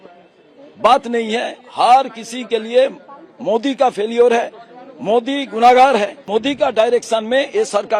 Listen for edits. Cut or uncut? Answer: cut